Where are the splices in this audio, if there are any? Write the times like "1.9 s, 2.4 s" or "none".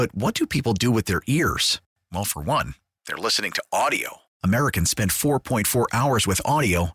none